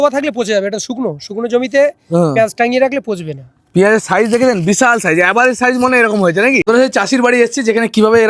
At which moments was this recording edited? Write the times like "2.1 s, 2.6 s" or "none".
6.6 s